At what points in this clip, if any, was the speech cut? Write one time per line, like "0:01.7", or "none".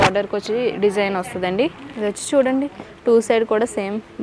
0:01.8